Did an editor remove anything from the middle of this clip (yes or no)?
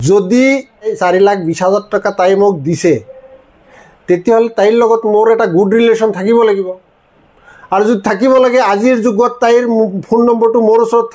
yes